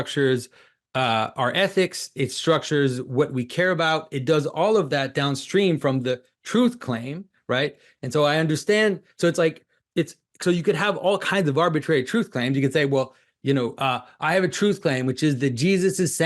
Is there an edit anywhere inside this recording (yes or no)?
no